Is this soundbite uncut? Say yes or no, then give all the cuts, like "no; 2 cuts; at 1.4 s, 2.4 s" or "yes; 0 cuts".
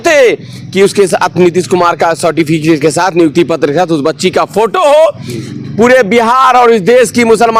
yes; 0 cuts